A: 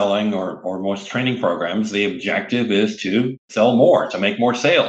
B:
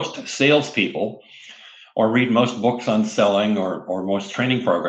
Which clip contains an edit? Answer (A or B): A